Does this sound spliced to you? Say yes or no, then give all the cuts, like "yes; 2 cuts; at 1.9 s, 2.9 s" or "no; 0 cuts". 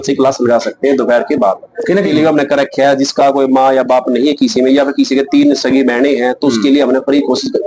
yes; 1 cut; at 2.0 s